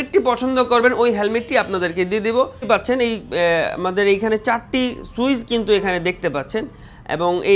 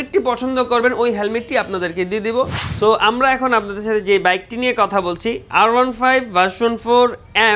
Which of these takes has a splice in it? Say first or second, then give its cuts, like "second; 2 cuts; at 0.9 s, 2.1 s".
first; 1 cut; at 2.6 s